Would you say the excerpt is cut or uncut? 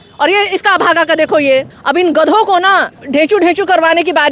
cut